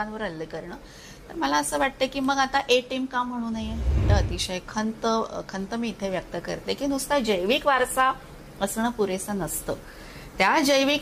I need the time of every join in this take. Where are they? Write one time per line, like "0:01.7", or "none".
0:04.0